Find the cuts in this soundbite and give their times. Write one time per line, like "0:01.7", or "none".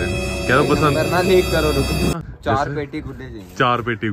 0:02.1